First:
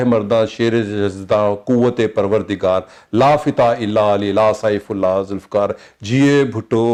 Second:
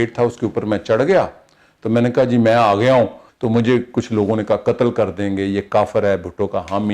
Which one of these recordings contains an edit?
second; 1 cut; at 3.3 s

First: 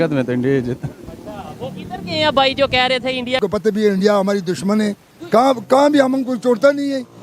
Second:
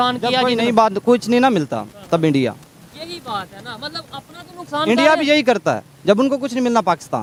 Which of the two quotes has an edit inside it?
first; 1 cut; at 3.4 s

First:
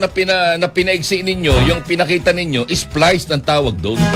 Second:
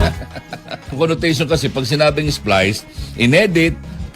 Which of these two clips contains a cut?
second; 1 cut; at 0.9 s

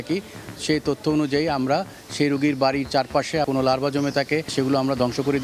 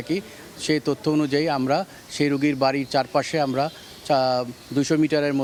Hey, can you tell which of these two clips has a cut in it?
first; 2 cuts; at 3.5 s, 4.5 s

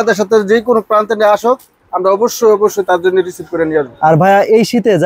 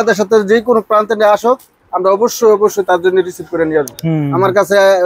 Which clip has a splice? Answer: second; 1 cut; at 3.9 s

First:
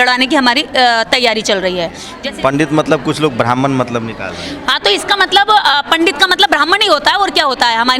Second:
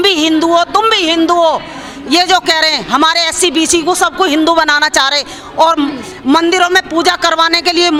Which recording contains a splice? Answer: first; 1 cut; at 2.0 s

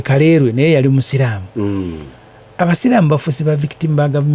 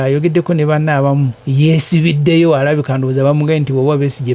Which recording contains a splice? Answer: second; 1 cut; at 1.4 s

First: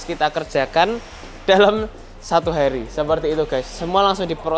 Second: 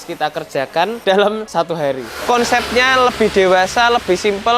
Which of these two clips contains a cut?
second; 2 cuts; at 1.0 s, 1.9 s

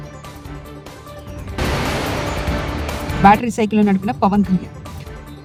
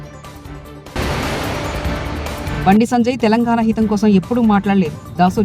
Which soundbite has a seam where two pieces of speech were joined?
second; 1 cut; at 0.9 s

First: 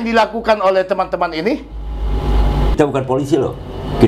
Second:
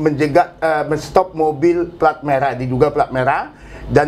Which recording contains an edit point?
first; 1 cut; at 2.8 s

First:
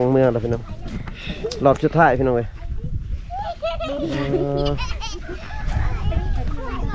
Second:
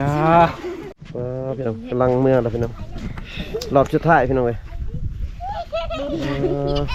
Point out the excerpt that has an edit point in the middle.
second; 1 cut; at 1.0 s

